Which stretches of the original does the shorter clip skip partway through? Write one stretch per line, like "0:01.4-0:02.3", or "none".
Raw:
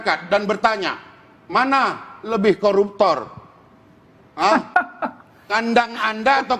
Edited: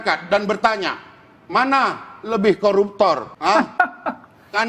0:03.3-0:04.3